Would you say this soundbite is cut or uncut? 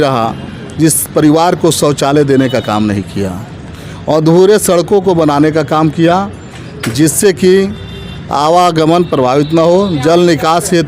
uncut